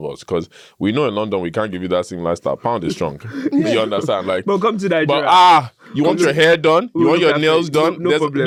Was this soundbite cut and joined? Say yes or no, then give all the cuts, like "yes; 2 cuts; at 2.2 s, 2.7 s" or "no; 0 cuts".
no; 0 cuts